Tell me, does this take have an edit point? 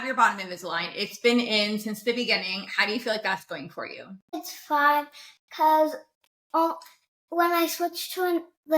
yes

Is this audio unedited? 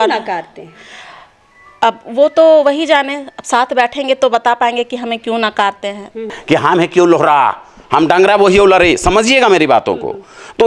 no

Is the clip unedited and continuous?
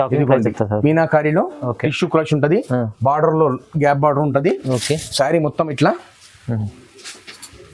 yes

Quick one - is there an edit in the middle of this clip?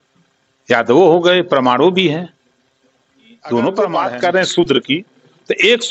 yes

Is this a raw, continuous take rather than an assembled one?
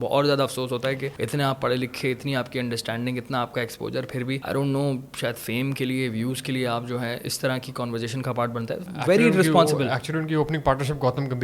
no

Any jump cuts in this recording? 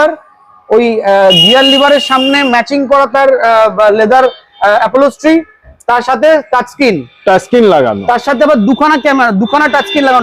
no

